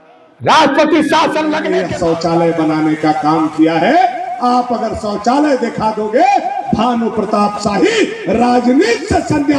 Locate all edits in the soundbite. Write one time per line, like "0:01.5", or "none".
0:01.6